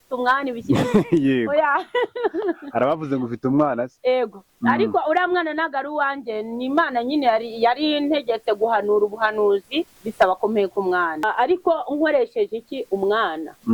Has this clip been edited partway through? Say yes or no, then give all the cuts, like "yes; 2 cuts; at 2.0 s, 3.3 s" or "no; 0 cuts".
yes; 1 cut; at 11.2 s